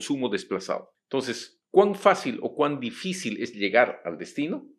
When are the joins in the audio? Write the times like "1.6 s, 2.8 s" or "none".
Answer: 0.9 s